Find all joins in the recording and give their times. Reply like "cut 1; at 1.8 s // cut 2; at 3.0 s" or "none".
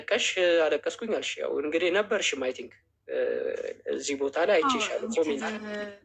none